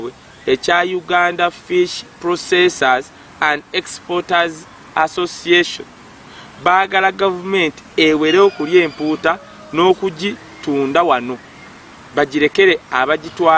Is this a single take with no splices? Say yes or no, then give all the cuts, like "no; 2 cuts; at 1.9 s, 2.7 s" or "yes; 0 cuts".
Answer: yes; 0 cuts